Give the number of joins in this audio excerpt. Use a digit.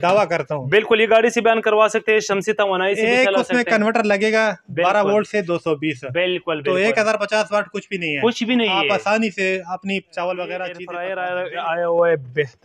1